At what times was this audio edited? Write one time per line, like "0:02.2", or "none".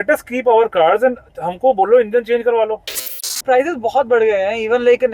0:03.4